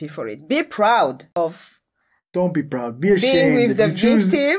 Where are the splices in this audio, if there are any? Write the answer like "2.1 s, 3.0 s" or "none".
1.2 s

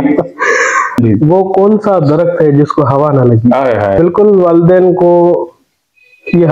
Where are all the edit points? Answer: 0.9 s, 4.0 s

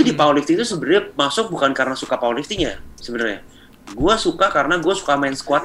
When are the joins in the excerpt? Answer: none

